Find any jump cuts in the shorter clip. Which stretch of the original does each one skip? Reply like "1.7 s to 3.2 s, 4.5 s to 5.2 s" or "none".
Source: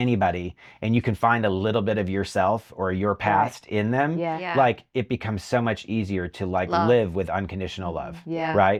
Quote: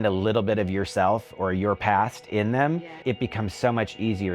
4.3 s to 4.8 s